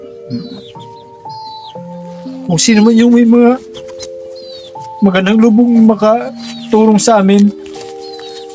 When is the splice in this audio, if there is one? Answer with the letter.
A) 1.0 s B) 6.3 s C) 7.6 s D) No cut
C